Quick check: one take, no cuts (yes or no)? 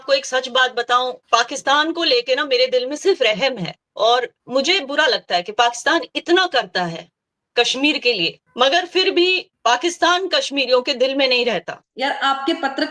no